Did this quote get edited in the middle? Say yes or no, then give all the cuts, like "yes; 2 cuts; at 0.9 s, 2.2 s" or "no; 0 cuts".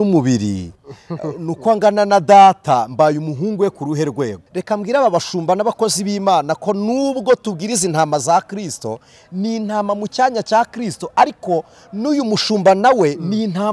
yes; 1 cut; at 4.5 s